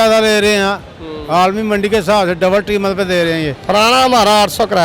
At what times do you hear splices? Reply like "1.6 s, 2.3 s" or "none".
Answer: 3.6 s